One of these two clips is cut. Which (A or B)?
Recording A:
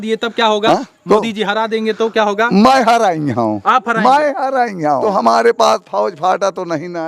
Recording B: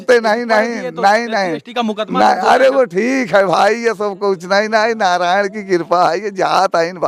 A